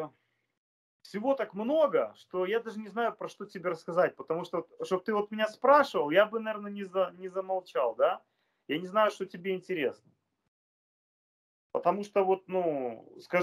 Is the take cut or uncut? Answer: uncut